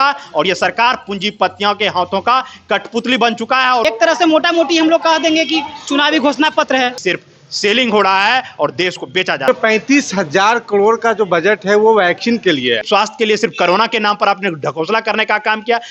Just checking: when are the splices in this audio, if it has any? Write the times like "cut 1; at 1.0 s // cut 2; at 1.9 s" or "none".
cut 1; at 3.8 s // cut 2; at 7.0 s // cut 3; at 9.5 s // cut 4; at 12.8 s